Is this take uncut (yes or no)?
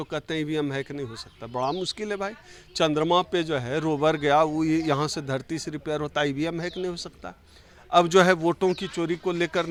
yes